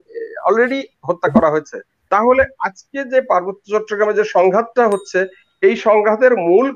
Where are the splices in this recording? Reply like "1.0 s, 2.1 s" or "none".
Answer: 2.0 s